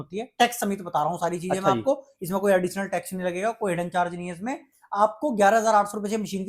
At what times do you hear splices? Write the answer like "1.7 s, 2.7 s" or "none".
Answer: none